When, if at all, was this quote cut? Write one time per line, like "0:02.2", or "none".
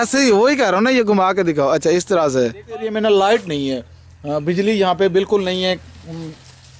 0:02.9